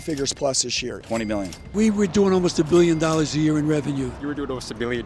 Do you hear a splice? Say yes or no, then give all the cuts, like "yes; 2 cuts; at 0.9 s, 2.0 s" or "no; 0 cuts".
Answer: yes; 2 cuts; at 1.1 s, 4.2 s